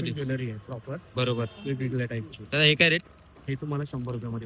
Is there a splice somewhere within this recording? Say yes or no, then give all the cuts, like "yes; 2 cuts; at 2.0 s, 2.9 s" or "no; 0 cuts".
no; 0 cuts